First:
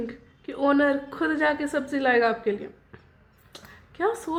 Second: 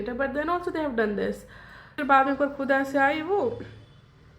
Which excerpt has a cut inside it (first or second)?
second